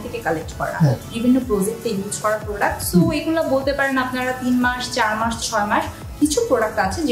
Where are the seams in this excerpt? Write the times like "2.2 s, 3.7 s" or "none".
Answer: none